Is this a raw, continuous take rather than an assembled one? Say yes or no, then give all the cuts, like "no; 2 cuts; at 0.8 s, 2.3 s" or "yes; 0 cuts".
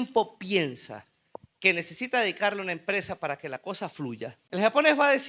no; 1 cut; at 4.4 s